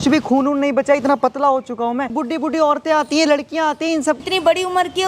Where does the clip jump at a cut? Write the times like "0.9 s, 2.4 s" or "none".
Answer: 2.2 s, 4.2 s